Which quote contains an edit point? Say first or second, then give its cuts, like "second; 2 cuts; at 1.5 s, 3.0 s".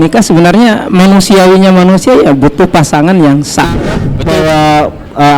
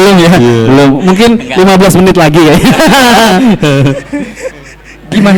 first; 1 cut; at 4.1 s